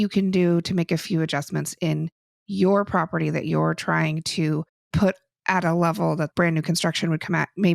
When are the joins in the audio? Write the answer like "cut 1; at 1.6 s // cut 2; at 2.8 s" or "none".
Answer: cut 1; at 4.8 s // cut 2; at 6.3 s